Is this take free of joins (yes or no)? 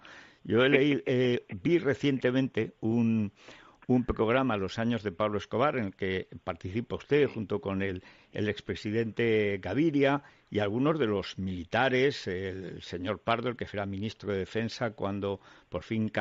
yes